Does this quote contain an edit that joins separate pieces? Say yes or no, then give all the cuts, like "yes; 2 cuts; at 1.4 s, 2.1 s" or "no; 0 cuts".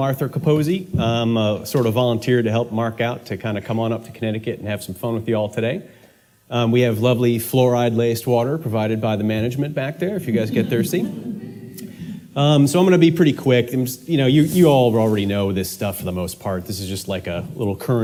no; 0 cuts